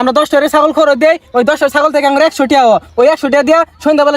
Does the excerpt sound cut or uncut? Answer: uncut